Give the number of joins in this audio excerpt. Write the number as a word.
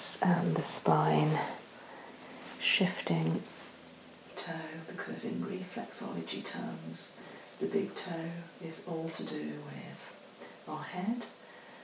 one